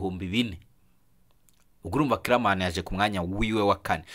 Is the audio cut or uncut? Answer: uncut